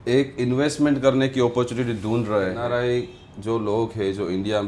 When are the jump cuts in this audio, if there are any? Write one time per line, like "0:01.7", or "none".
0:02.6